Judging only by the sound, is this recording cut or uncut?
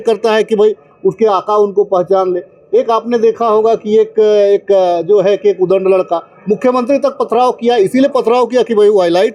uncut